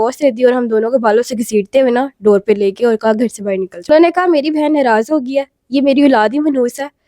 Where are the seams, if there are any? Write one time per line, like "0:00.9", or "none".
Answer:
0:03.8